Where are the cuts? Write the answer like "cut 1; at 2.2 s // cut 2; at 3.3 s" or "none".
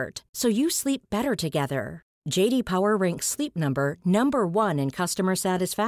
none